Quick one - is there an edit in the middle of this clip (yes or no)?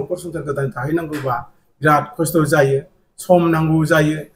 no